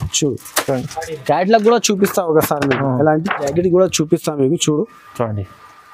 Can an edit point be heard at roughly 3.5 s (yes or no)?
yes